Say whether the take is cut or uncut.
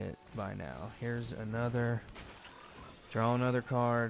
uncut